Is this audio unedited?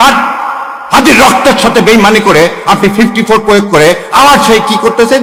yes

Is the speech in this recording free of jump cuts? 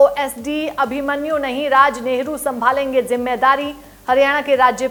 yes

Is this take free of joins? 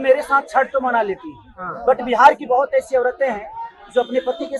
yes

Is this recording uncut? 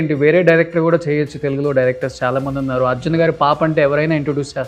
yes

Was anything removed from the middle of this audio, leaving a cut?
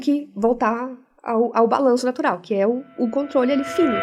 no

